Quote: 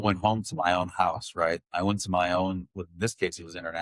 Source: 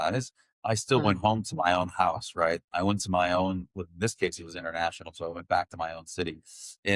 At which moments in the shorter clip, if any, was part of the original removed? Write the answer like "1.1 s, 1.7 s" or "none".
none